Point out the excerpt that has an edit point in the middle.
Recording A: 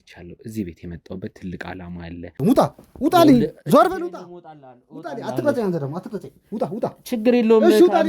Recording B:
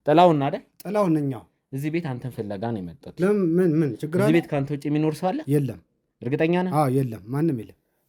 A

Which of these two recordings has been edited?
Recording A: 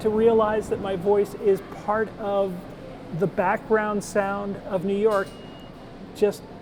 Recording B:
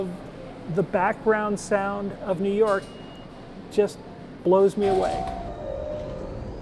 B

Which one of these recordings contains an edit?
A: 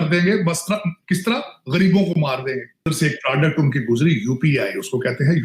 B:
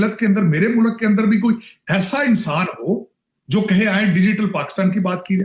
A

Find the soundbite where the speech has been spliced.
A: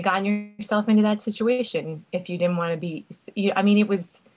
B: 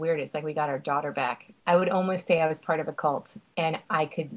B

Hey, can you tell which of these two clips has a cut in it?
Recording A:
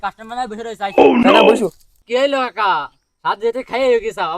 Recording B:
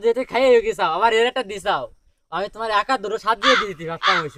A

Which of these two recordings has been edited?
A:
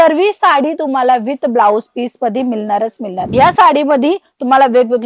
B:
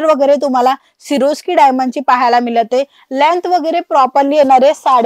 A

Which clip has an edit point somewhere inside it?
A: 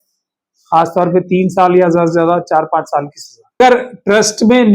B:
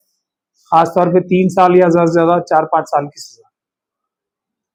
A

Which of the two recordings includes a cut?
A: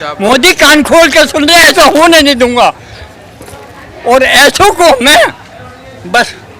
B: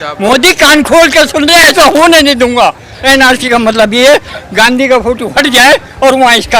B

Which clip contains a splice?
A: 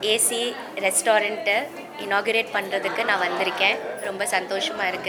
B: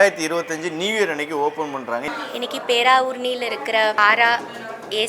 B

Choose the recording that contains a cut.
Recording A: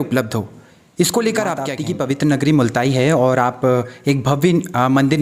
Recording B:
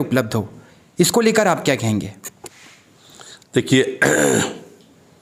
A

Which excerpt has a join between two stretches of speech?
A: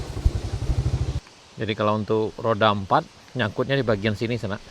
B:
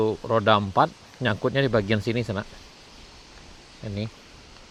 A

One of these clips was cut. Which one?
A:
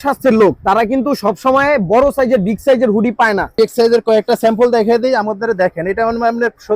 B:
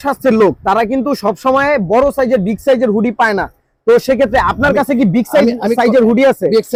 A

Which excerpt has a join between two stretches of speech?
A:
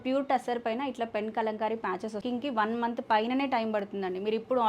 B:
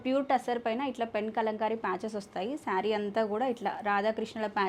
A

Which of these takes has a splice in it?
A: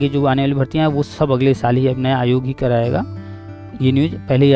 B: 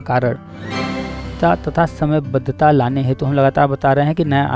B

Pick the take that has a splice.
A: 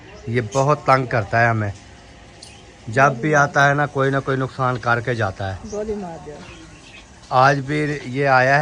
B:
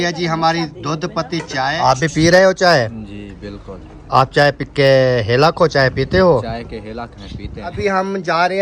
B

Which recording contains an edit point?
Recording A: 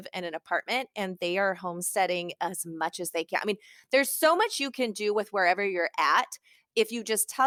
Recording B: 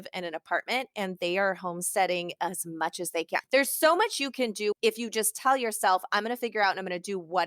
B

